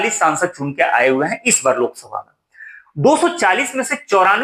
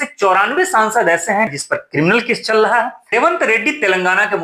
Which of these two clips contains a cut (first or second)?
second